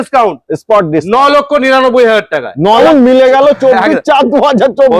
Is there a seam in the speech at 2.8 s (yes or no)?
yes